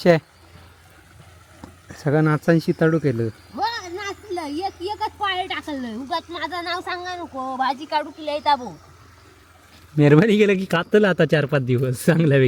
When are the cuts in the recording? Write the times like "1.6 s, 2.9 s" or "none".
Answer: none